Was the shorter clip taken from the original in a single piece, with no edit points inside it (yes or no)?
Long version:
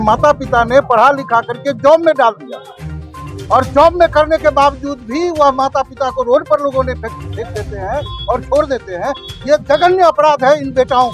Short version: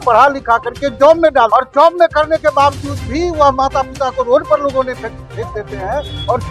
no